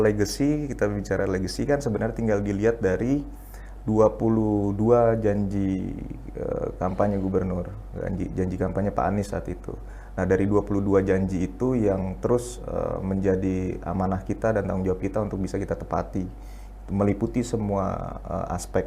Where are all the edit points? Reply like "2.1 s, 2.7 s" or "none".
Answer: none